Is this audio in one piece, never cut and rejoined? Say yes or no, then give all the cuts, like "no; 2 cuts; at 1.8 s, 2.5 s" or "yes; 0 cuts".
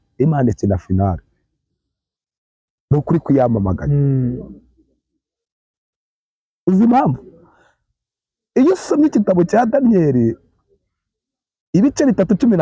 yes; 0 cuts